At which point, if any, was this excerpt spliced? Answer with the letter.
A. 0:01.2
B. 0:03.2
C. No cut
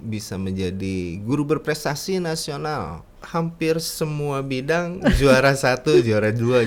B